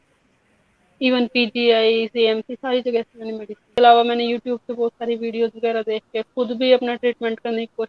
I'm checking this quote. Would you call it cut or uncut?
cut